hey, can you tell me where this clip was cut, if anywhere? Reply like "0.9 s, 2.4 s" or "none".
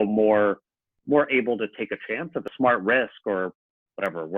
2.5 s